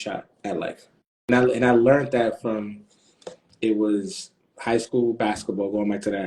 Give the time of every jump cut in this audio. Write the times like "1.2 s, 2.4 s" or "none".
1.1 s